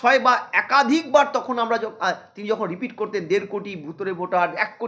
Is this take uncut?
yes; 0 cuts

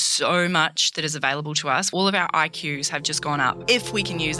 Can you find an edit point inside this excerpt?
yes; 2 cuts; at 1.9 s, 3.6 s

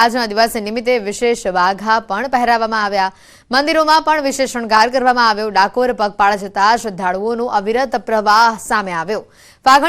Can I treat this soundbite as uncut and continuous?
yes; 0 cuts

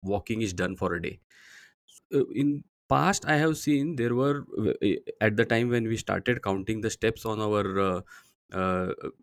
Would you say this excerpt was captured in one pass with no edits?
no; 1 cut; at 1.9 s

